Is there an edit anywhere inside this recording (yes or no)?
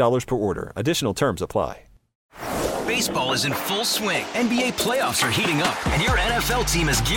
yes